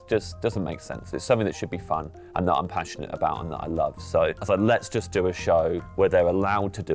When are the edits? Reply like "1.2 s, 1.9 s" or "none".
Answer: 4.4 s, 5.8 s